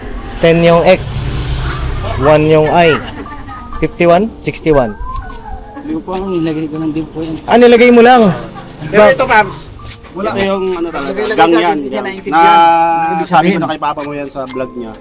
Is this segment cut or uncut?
uncut